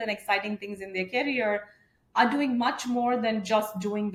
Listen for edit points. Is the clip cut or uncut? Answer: uncut